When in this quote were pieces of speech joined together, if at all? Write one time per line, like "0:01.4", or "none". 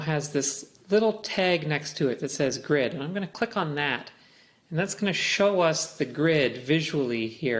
0:03.5